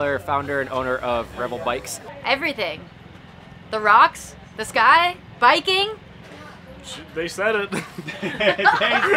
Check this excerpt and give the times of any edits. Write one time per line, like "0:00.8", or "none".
0:02.2